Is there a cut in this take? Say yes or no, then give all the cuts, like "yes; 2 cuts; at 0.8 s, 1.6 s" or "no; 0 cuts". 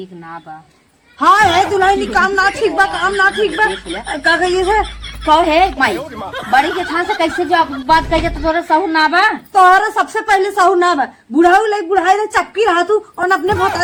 no; 0 cuts